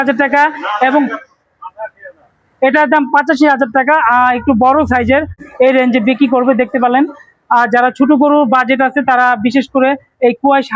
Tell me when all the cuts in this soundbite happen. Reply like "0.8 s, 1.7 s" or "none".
5.4 s